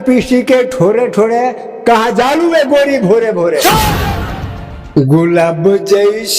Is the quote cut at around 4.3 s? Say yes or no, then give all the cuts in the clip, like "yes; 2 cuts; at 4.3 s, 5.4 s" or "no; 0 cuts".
yes; 1 cut; at 4.3 s